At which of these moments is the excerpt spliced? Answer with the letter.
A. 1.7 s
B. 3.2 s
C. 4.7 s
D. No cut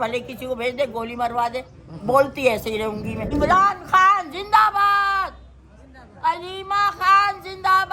B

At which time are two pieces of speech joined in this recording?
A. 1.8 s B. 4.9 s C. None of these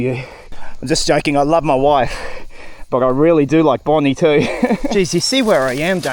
B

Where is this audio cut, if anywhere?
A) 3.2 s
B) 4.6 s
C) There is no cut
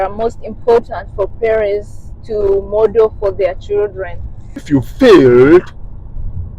B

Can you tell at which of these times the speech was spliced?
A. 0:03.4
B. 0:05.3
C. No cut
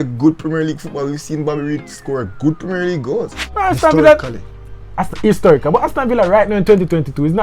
A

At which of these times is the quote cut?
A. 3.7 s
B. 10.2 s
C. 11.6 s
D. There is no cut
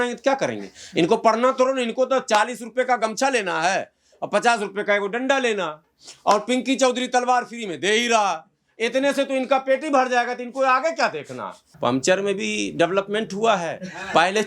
C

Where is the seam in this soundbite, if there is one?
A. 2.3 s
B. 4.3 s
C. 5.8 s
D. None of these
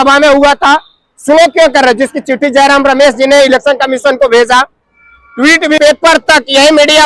C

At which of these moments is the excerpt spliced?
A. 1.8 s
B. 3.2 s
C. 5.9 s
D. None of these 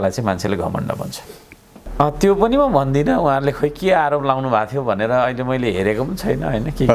A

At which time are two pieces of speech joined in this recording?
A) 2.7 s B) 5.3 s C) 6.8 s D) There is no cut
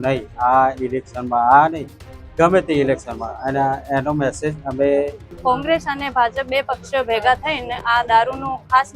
B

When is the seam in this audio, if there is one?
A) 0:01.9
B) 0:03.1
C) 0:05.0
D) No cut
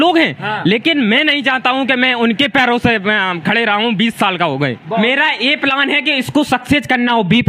C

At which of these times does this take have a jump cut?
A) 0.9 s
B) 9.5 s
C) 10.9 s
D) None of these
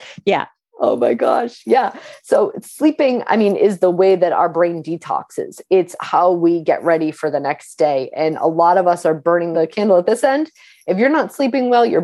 B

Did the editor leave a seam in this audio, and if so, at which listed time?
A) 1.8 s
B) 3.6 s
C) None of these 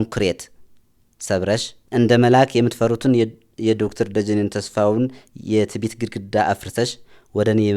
A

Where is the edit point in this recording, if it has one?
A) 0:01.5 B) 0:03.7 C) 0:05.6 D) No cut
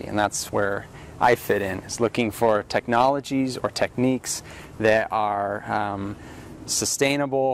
D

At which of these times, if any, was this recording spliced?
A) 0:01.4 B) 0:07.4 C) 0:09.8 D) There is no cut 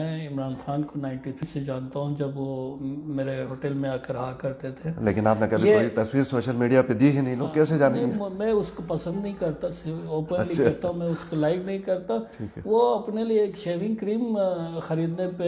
A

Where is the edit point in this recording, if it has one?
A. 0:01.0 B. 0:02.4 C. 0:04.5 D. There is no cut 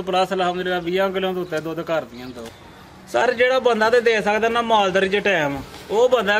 B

